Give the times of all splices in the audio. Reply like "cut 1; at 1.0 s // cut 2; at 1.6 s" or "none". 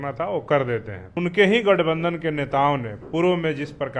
cut 1; at 1.2 s